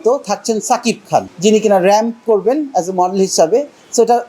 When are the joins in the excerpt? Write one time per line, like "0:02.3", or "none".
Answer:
0:01.3